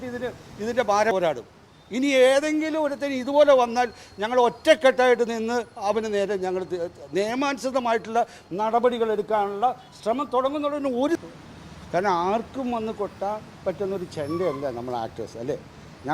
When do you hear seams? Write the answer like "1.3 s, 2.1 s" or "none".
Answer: 1.1 s, 11.2 s